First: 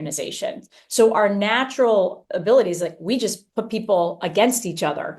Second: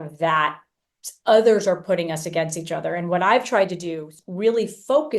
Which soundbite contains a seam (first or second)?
second